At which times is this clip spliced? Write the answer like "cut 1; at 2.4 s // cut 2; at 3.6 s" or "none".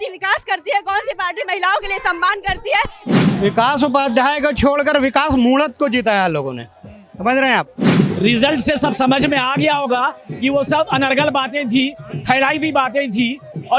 cut 1; at 3.2 s // cut 2; at 7.9 s